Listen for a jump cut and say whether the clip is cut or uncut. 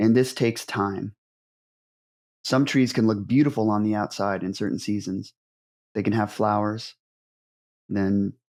uncut